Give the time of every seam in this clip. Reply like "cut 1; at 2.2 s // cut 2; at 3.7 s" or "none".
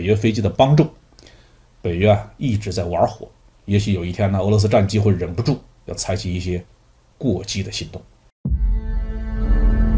cut 1; at 8.2 s